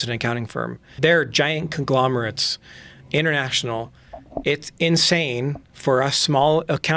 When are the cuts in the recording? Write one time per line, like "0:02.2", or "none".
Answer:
0:01.0